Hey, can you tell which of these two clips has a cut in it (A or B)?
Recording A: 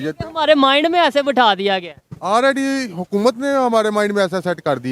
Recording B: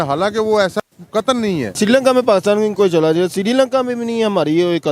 B